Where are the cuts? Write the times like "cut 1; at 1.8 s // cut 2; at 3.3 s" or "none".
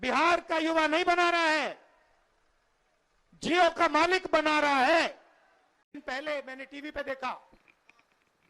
cut 1; at 6.0 s